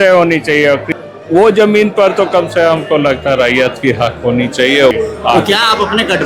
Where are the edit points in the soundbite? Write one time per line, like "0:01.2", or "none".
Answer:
0:01.0
0:04.9